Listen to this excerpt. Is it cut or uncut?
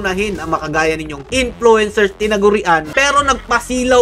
cut